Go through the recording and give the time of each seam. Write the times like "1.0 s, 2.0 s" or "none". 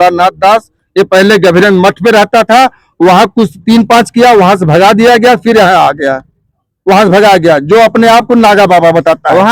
none